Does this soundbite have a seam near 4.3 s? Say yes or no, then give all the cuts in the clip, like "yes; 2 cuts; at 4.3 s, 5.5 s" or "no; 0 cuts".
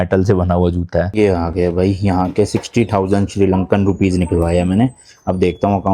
no; 1 cut; at 1.1 s